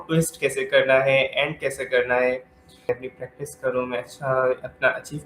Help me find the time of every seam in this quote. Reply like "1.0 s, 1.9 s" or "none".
2.9 s